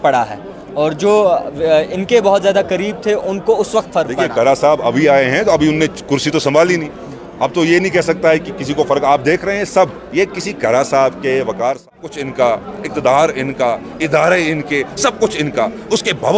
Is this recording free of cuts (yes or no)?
no